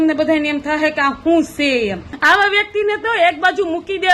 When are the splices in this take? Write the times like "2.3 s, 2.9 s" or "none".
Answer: 2.1 s